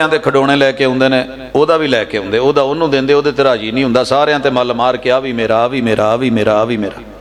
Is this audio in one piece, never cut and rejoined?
yes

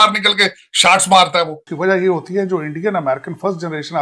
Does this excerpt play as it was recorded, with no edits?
no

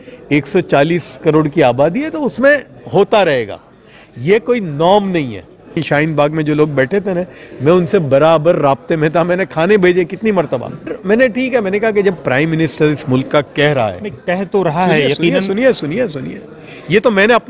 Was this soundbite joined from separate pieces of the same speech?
yes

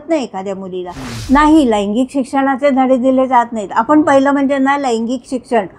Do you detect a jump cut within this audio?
yes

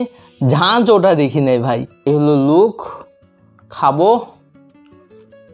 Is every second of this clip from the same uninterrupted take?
no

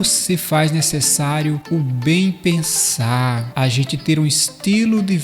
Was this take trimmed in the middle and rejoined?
yes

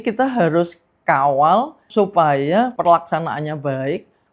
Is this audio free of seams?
no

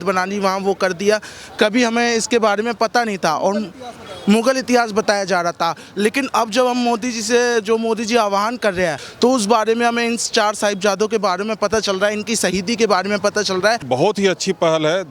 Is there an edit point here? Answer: yes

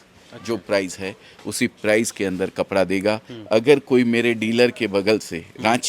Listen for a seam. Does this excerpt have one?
no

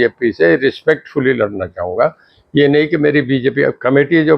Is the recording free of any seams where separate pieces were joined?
yes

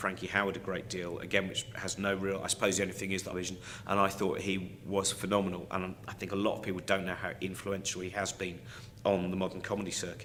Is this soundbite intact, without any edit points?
yes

